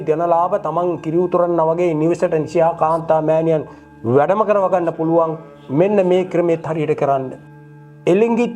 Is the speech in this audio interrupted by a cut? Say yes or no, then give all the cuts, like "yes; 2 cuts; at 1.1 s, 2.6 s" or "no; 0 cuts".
yes; 1 cut; at 7.4 s